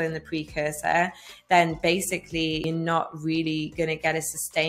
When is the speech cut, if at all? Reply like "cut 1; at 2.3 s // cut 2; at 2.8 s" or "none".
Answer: cut 1; at 2.6 s